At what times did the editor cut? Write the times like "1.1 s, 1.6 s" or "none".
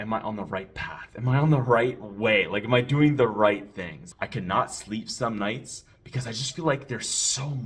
4.1 s